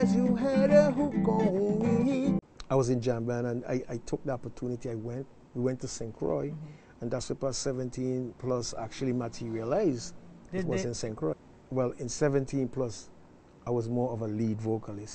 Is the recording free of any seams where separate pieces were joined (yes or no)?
no